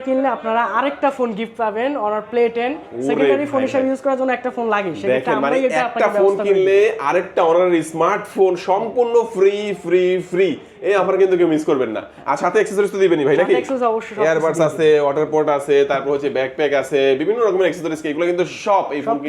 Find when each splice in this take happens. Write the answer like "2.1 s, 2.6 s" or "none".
none